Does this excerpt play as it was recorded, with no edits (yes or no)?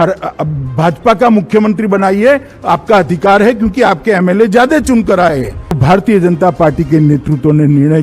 no